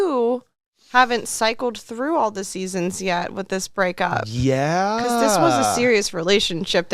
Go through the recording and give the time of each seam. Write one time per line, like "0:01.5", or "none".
none